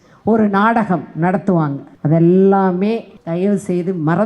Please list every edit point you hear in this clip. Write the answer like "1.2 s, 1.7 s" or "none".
1.9 s, 3.1 s